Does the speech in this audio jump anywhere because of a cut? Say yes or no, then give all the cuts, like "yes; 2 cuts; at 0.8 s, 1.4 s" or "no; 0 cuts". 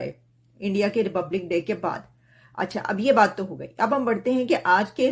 no; 0 cuts